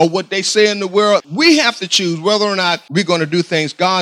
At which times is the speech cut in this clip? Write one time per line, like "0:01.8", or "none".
0:01.3
0:02.8